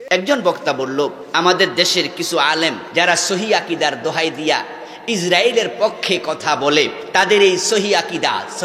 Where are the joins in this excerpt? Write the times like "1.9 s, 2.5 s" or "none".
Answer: 1.2 s, 2.8 s, 7.0 s